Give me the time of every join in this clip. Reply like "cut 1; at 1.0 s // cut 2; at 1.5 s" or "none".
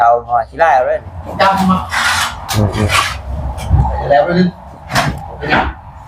cut 1; at 1.2 s